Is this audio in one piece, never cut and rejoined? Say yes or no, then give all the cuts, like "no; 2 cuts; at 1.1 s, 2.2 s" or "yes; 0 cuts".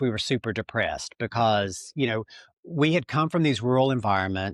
yes; 0 cuts